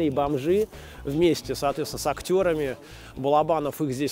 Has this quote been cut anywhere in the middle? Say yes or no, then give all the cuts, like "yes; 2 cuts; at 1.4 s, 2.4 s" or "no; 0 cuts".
no; 0 cuts